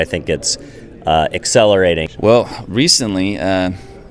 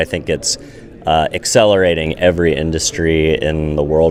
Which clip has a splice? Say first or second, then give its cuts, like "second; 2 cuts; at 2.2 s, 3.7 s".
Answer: first; 1 cut; at 2.1 s